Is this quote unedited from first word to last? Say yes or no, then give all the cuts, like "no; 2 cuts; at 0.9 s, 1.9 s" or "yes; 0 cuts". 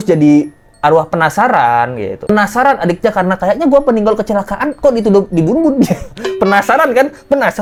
yes; 0 cuts